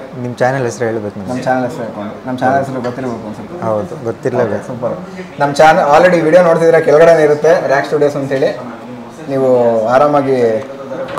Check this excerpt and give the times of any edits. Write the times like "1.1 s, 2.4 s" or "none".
none

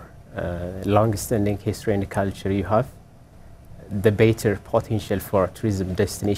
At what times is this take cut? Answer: none

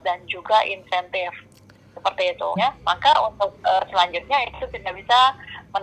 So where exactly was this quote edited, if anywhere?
2.6 s

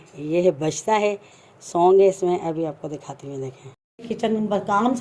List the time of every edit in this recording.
3.9 s

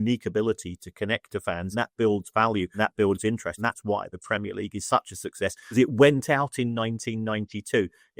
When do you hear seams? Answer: 1.7 s, 2.7 s, 3.6 s, 5.7 s

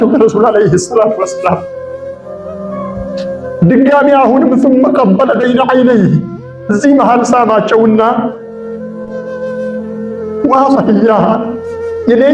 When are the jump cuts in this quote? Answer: 1.6 s, 3.6 s, 9.0 s, 10.4 s

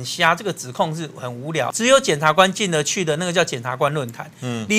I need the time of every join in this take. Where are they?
1.6 s

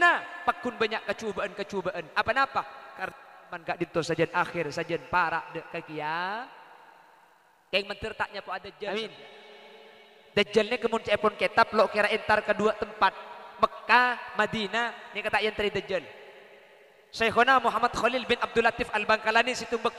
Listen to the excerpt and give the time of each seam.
8.9 s

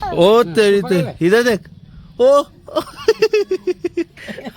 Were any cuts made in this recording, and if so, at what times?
none

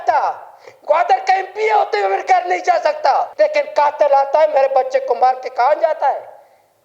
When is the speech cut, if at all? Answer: 3.3 s

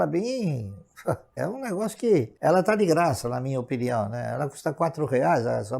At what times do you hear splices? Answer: 1.3 s, 2.3 s

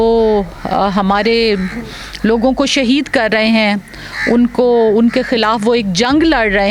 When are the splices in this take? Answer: none

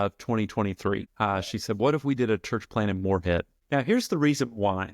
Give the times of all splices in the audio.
1.1 s, 3.5 s

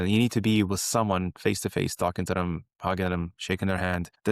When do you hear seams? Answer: 3.3 s

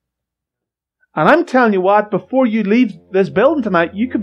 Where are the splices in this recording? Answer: none

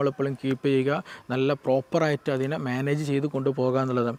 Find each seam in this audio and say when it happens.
none

